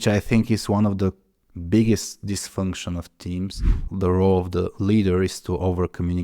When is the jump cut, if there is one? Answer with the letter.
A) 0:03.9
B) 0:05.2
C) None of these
A